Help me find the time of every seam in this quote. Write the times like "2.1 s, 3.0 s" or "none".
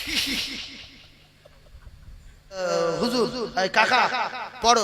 2.6 s